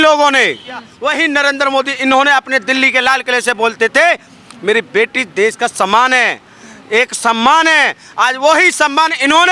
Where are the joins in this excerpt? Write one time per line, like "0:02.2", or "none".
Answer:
0:00.9